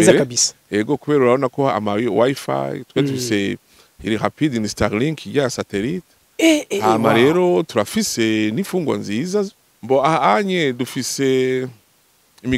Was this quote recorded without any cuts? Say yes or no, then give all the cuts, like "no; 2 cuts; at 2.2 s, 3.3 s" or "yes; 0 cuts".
no; 1 cut; at 9.6 s